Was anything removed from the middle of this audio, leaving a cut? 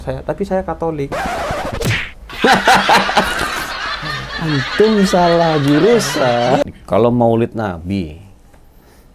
yes; 1 cut; at 6.6 s

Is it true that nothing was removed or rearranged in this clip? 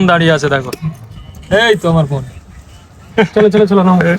yes; 0 cuts

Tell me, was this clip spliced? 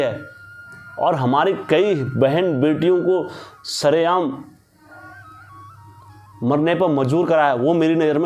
no; 0 cuts

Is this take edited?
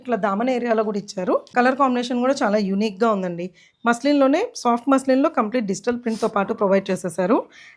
yes; 1 cut; at 1.5 s

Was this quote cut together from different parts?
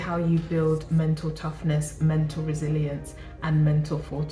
no; 0 cuts

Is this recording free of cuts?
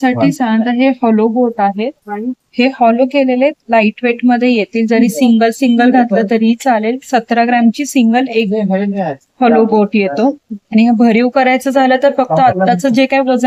yes; 0 cuts

